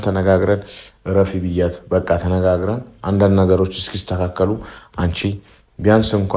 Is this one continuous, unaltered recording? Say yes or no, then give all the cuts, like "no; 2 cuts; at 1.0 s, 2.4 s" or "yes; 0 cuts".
yes; 0 cuts